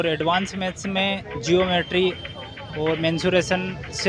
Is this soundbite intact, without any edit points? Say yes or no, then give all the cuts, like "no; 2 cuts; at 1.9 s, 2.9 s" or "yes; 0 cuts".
yes; 0 cuts